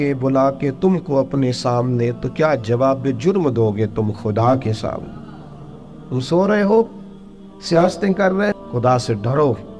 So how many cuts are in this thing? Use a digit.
1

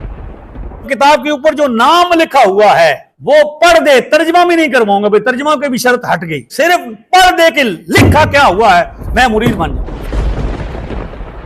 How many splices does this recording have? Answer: 3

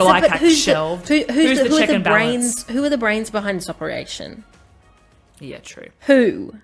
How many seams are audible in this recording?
0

